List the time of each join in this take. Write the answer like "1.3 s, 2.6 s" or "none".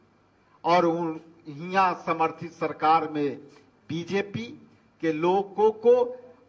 none